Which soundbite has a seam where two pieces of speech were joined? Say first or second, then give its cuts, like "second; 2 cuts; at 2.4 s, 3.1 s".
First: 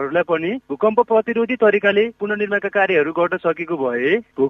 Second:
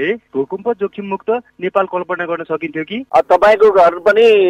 second; 1 cut; at 3.0 s